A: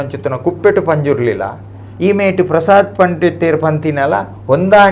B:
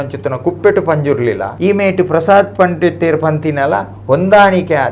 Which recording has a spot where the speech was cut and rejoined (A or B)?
B